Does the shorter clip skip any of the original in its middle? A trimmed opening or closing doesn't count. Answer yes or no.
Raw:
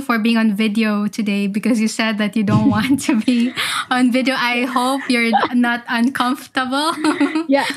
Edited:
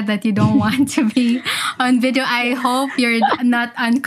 no